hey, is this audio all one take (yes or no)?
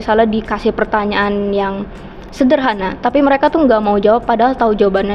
yes